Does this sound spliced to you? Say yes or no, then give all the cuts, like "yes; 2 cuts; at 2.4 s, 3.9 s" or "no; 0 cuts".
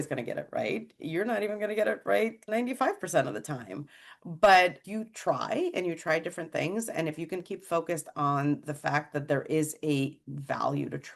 no; 0 cuts